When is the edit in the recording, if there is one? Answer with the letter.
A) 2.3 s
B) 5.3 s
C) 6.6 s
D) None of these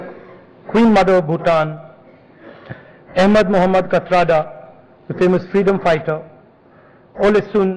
B